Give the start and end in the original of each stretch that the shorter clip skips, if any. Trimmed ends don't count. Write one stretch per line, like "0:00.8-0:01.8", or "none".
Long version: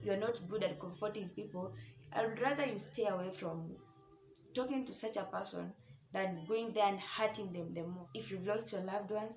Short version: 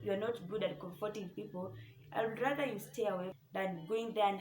0:03.3-0:05.9